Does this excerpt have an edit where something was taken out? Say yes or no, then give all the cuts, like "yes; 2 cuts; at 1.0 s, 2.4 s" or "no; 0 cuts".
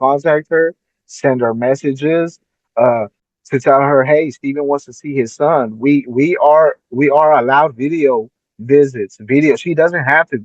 no; 0 cuts